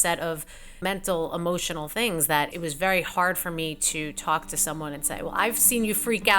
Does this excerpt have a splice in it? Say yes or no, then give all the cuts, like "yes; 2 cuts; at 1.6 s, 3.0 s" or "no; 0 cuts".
yes; 2 cuts; at 0.8 s, 2.5 s